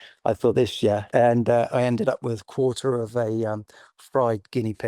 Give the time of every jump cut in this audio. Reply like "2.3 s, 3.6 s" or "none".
1.1 s